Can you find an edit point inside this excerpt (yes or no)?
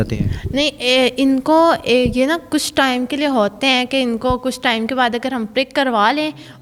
no